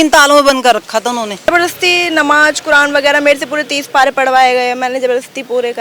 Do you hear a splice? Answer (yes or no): yes